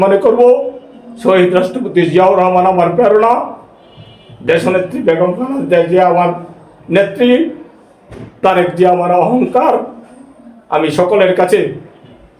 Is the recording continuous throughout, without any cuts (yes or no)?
yes